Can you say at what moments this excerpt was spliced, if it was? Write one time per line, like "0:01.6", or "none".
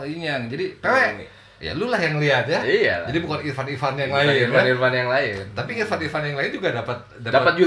none